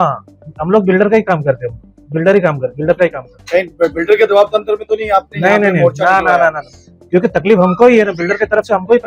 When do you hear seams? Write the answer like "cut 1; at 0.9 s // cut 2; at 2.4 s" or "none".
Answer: none